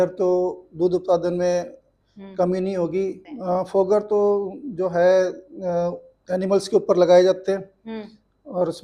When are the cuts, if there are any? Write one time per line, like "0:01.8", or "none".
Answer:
0:03.3